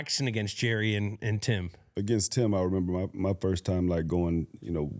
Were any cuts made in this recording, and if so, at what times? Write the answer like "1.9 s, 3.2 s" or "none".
1.8 s